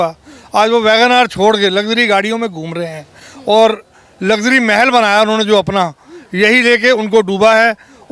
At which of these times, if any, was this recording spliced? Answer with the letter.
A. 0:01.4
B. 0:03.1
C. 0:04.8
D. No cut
D